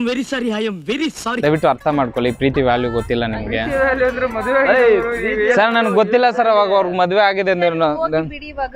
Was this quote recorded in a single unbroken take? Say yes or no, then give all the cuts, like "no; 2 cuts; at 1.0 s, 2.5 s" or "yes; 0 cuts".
no; 1 cut; at 1.4 s